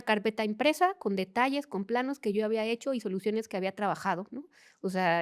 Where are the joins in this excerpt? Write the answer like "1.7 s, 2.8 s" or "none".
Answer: none